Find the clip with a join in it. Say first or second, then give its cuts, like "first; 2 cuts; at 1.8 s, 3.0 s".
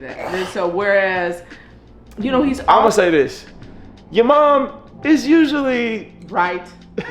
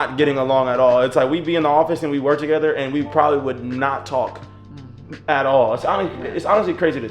first; 1 cut; at 2.6 s